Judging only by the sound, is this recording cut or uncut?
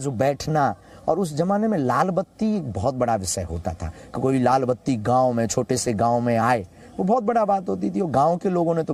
uncut